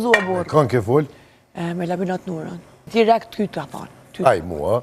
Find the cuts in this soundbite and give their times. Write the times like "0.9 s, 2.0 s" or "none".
2.8 s

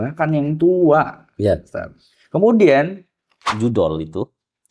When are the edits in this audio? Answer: 3.4 s

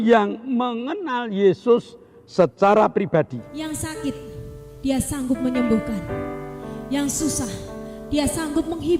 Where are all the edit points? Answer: 3.5 s

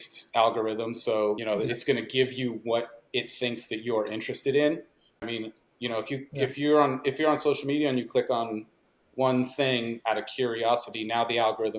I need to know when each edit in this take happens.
1.4 s, 5.3 s

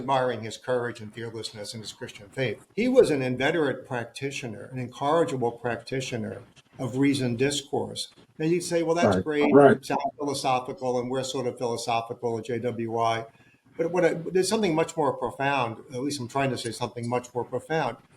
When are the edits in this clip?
2.7 s

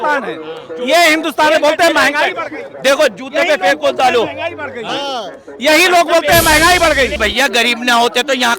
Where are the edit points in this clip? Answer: 7.2 s

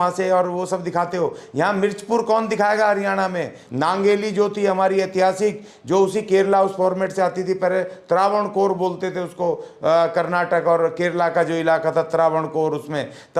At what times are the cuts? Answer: 3.6 s

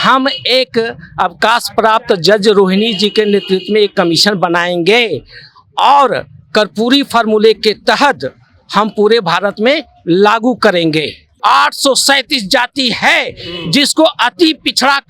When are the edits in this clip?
11.3 s

